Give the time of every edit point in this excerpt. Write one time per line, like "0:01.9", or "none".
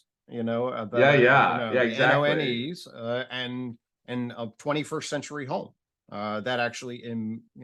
none